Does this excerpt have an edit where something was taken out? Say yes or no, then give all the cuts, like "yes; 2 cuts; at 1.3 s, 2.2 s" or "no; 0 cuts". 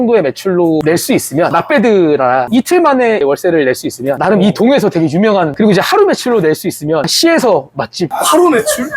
yes; 3 cuts; at 2.5 s, 5.5 s, 8.1 s